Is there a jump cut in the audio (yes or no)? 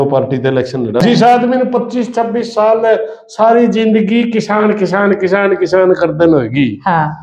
yes